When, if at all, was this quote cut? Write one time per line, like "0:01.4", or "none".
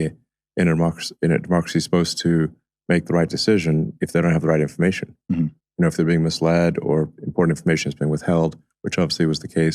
none